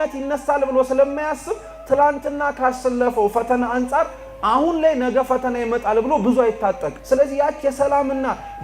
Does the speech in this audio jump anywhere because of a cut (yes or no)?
yes